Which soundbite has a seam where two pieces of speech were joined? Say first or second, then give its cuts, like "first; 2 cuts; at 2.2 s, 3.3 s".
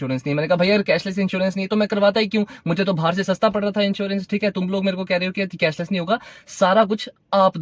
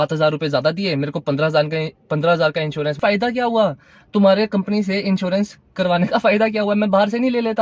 second; 1 cut; at 3.0 s